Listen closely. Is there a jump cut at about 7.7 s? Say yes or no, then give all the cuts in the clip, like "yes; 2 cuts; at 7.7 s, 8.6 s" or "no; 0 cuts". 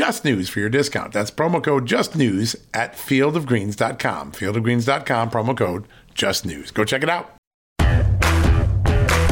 yes; 1 cut; at 7.7 s